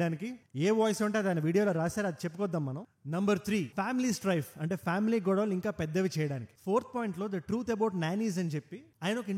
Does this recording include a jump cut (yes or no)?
yes